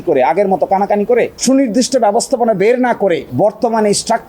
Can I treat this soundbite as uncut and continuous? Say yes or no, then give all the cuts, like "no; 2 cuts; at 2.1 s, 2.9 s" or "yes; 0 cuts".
no; 1 cut; at 1.3 s